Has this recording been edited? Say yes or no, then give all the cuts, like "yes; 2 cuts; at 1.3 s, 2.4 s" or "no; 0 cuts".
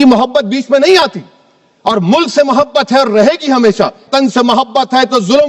yes; 1 cut; at 4.1 s